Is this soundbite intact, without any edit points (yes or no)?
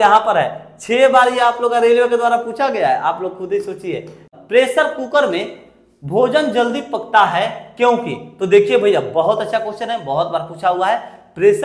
no